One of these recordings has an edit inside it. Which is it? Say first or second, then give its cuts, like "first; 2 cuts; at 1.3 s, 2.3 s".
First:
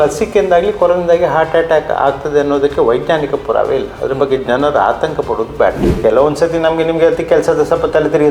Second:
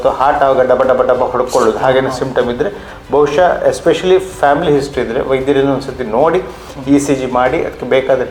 first; 1 cut; at 5.8 s